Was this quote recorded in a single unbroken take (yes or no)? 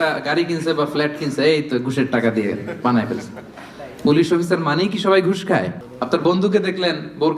no